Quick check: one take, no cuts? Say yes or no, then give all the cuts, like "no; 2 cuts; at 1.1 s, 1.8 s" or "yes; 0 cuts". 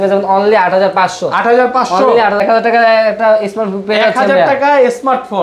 no; 1 cut; at 2.4 s